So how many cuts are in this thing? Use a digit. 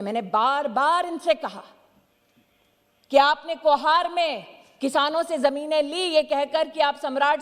0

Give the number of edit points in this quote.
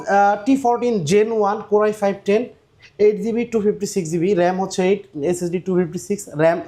0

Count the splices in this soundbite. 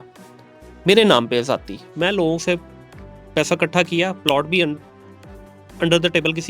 0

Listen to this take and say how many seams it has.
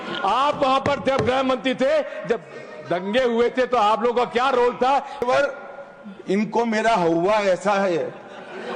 1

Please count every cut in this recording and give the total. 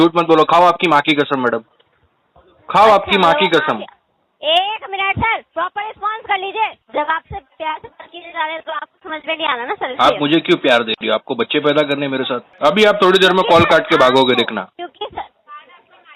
2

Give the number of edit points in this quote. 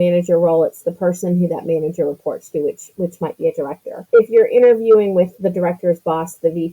2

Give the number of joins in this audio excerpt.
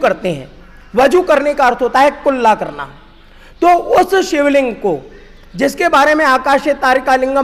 0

